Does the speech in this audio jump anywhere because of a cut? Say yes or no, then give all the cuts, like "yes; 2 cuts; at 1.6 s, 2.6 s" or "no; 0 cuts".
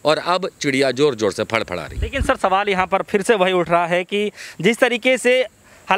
no; 0 cuts